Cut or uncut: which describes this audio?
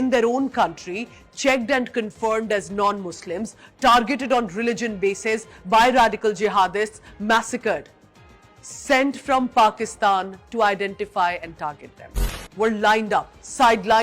cut